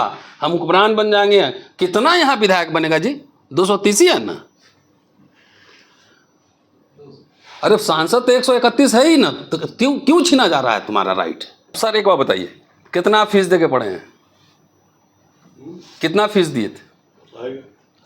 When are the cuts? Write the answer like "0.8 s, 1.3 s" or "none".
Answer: 11.8 s

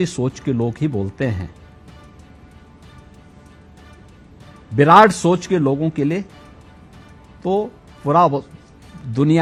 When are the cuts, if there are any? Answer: none

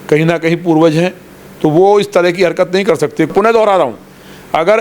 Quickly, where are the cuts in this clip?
3.3 s

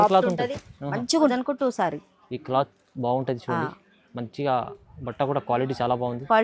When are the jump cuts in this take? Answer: 1.3 s

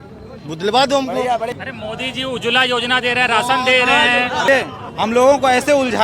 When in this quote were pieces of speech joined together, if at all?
1.5 s, 4.5 s

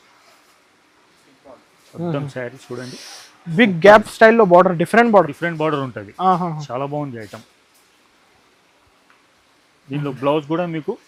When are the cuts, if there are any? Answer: none

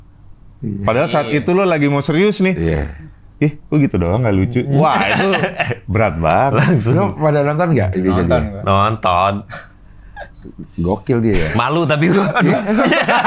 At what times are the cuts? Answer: none

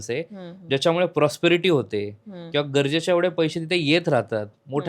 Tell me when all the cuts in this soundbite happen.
none

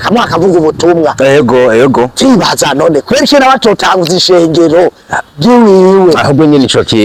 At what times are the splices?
none

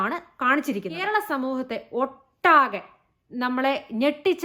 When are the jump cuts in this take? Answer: 1.1 s

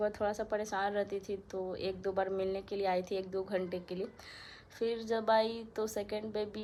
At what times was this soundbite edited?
none

